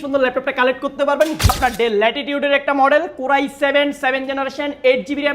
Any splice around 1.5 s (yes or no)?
yes